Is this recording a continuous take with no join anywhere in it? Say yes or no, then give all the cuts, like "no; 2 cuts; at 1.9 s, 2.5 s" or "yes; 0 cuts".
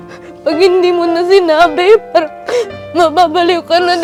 yes; 0 cuts